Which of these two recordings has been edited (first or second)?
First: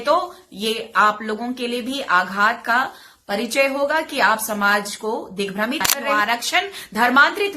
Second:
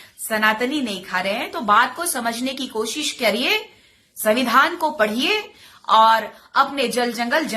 first